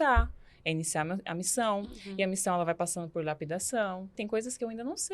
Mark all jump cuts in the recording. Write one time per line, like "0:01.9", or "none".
0:04.2

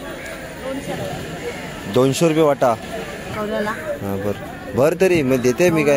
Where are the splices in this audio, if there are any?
0:03.3

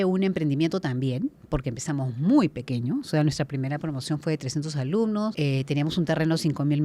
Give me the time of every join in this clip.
0:05.3

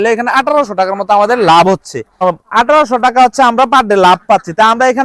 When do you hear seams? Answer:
none

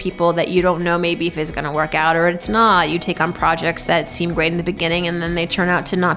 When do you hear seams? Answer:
none

